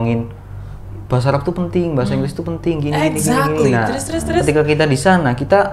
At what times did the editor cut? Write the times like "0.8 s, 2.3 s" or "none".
none